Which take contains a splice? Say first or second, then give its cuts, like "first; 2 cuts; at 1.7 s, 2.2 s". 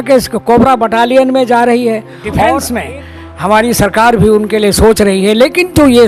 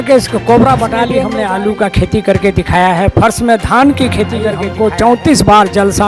second; 2 cuts; at 1.2 s, 4.7 s